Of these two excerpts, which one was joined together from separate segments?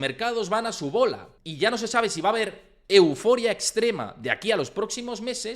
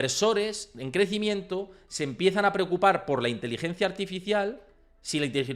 first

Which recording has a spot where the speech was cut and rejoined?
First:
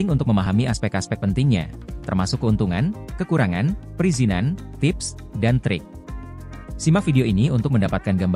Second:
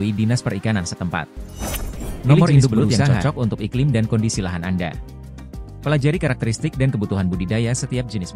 second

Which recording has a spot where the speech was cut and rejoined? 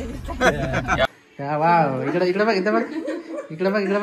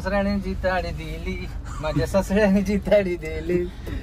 first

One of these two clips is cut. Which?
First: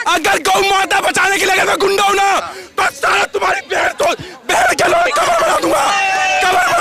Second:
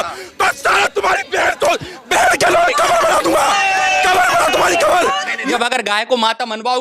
second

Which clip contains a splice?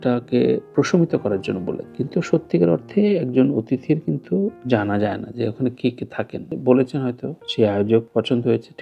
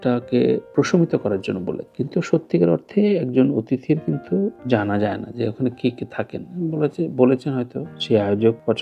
first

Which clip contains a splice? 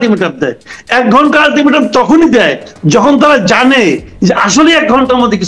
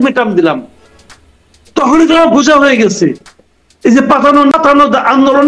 second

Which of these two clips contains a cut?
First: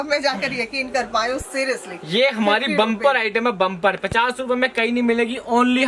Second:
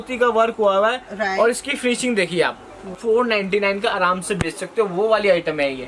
second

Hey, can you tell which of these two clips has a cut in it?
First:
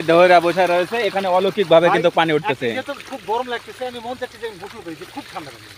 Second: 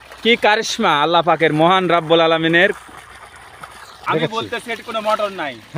second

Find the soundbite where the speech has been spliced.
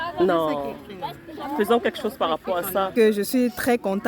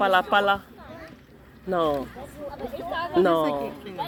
first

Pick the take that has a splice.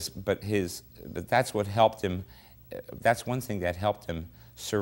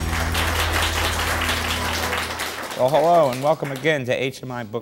first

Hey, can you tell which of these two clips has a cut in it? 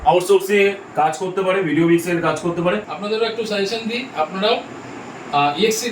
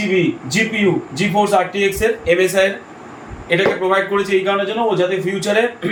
first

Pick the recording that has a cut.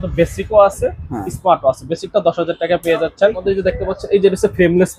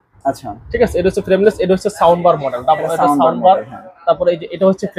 first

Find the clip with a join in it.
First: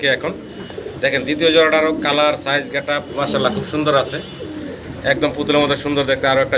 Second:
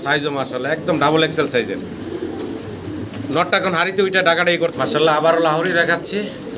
second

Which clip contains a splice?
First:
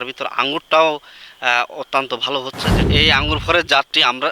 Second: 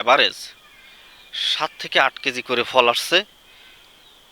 first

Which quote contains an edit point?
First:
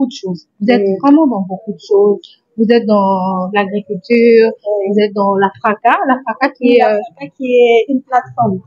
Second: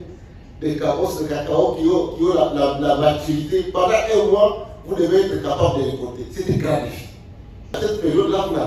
second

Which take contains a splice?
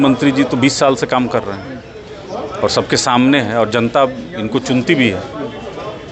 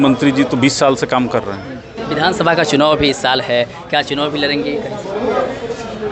second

